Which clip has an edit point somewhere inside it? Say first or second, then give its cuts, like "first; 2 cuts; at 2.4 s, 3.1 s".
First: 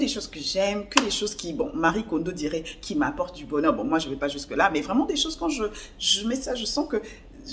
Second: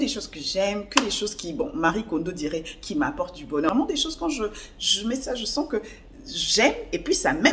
second; 1 cut; at 3.7 s